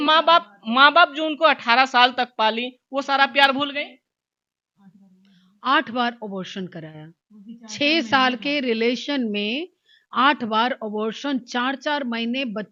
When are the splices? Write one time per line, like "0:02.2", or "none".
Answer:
none